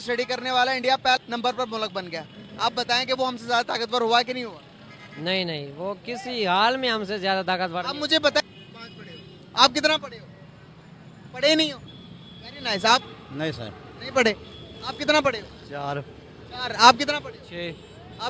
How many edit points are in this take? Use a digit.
2